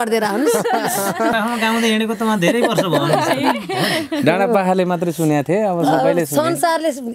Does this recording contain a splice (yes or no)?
yes